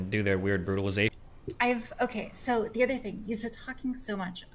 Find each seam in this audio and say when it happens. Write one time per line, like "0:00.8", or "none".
0:01.2